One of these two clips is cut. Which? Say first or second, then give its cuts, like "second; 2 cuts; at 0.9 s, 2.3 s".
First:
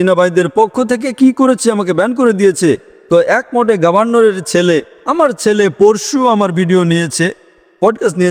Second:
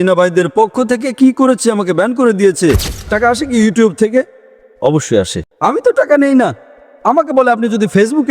second; 2 cuts; at 3.0 s, 5.4 s